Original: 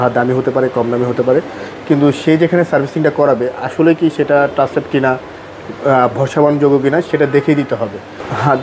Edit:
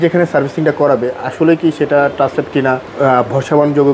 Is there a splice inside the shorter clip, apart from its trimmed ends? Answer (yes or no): yes